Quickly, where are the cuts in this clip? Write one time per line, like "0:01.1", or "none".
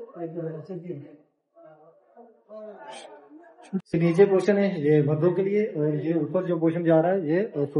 0:03.8